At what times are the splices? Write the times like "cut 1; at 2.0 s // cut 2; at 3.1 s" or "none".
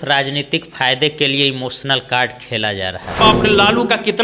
cut 1; at 3.2 s